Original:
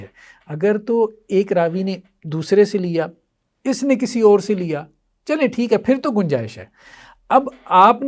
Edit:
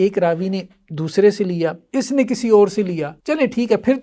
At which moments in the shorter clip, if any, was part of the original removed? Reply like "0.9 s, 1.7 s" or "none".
1.8 s, 3.1 s